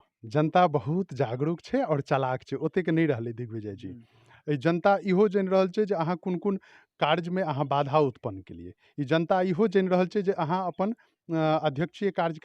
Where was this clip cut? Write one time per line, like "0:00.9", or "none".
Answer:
none